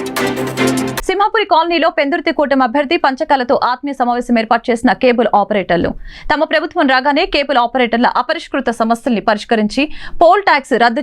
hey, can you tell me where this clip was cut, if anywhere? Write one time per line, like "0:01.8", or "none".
0:01.0